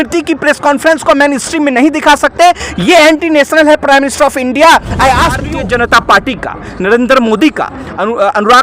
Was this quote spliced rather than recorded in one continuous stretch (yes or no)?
yes